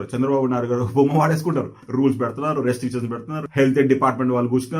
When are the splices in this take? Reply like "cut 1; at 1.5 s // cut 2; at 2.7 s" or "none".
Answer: cut 1; at 1.8 s // cut 2; at 3.3 s